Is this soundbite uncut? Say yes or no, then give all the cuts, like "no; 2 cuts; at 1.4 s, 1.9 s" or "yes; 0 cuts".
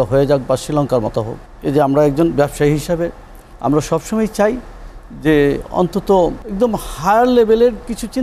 no; 2 cuts; at 1.4 s, 6.4 s